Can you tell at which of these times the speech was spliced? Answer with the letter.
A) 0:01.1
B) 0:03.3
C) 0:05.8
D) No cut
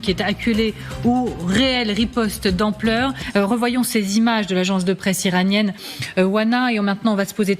B